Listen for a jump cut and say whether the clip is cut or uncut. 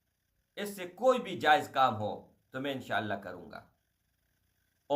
uncut